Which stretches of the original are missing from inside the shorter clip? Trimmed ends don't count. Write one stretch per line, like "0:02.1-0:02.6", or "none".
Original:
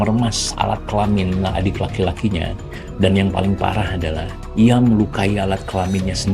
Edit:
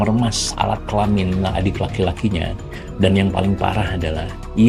none